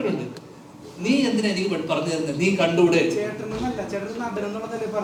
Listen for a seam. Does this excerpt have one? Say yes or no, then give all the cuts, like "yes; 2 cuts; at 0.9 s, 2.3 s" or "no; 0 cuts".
no; 0 cuts